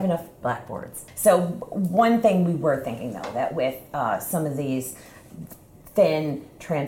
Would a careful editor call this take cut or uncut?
cut